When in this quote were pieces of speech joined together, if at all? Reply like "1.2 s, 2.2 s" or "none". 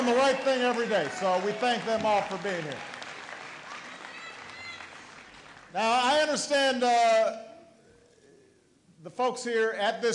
2.8 s